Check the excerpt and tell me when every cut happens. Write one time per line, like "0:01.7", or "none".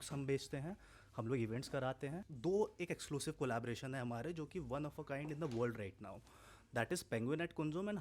0:02.3